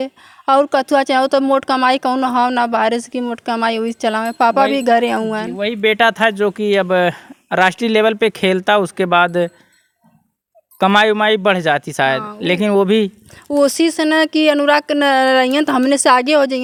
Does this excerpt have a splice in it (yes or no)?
no